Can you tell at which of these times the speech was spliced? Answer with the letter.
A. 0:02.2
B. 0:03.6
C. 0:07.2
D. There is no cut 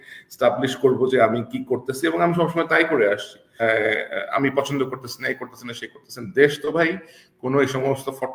B